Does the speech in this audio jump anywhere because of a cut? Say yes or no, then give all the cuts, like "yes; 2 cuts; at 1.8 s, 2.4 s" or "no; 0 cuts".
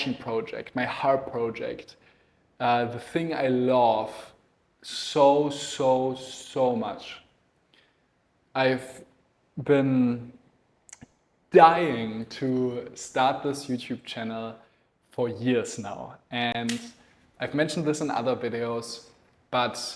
no; 0 cuts